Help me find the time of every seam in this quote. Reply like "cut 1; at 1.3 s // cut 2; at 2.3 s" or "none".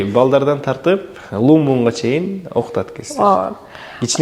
none